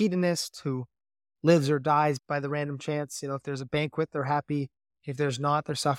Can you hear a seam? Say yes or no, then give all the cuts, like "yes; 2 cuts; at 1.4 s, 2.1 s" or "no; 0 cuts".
yes; 1 cut; at 2.2 s